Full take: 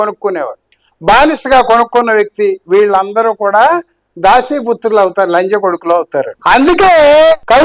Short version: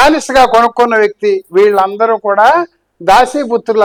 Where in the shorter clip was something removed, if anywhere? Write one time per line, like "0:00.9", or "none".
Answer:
none